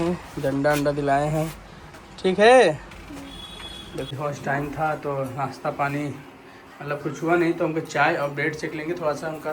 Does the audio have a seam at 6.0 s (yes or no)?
no